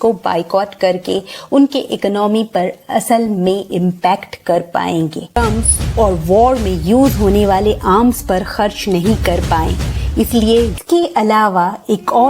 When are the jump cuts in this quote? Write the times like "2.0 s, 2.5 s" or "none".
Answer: 5.4 s, 10.7 s